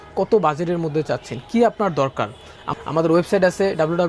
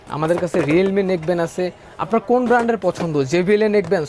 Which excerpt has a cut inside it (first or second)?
first